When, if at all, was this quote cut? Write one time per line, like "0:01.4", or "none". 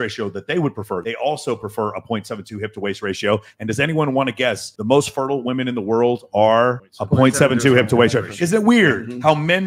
0:01.0